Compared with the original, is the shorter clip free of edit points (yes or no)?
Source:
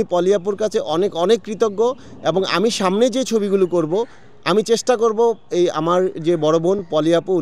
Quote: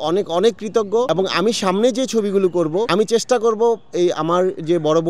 no